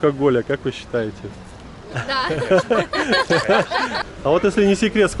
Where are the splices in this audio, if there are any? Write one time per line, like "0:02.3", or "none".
0:04.0